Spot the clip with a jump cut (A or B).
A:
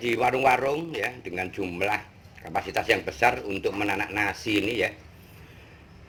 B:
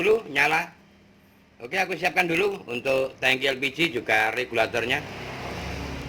B